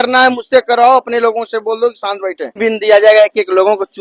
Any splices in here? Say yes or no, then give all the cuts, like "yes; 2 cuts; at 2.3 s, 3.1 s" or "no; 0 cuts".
yes; 1 cut; at 2.6 s